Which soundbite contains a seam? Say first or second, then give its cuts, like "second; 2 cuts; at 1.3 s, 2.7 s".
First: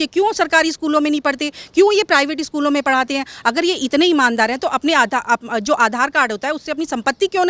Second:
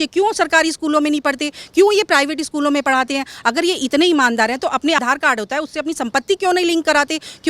second; 1 cut; at 5.0 s